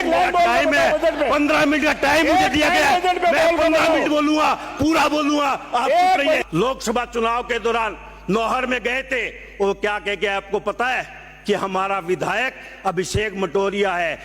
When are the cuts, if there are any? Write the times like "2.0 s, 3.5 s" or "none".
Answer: 6.4 s